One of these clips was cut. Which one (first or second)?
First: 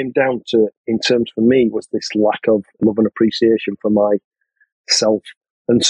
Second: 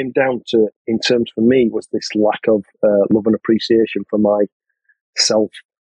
first